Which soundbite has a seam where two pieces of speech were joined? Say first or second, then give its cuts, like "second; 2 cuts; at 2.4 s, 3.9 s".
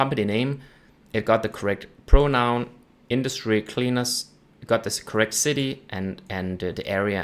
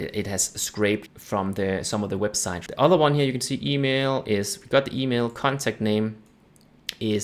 second; 2 cuts; at 1.1 s, 2.6 s